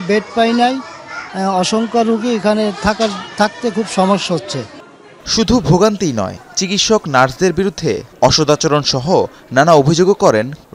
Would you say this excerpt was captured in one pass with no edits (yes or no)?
yes